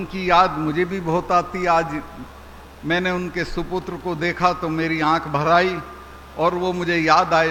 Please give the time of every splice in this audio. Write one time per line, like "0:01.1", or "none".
none